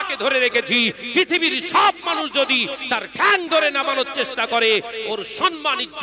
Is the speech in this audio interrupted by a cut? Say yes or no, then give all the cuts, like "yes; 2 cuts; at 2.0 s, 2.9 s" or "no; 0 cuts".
no; 0 cuts